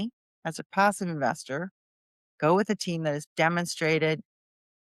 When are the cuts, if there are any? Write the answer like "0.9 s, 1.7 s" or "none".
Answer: none